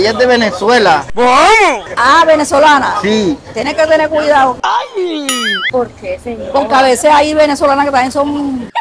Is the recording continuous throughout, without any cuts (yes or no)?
yes